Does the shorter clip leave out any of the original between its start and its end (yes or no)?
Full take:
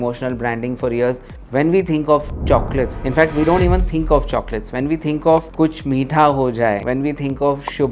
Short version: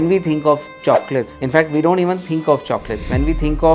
no